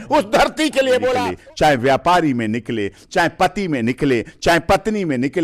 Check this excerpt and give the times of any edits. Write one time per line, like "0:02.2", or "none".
0:01.2